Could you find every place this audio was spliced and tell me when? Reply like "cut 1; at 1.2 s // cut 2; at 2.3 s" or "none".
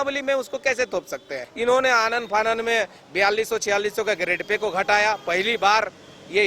cut 1; at 1.4 s